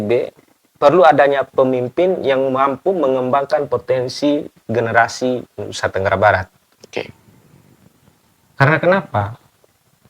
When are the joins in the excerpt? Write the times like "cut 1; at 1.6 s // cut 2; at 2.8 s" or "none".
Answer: none